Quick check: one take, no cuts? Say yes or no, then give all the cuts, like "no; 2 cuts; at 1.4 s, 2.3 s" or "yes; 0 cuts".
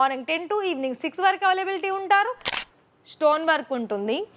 no; 1 cut; at 2.5 s